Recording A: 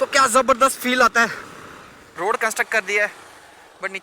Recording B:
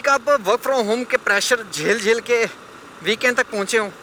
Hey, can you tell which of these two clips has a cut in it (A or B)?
A